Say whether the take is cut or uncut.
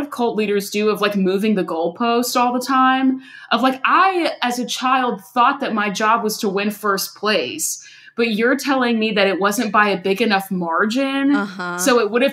uncut